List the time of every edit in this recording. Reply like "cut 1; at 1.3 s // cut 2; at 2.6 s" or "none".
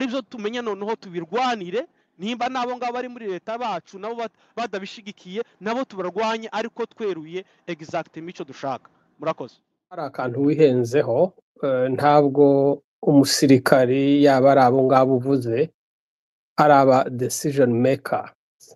cut 1; at 9.9 s

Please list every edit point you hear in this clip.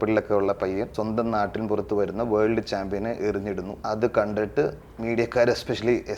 cut 1; at 0.9 s // cut 2; at 3.7 s

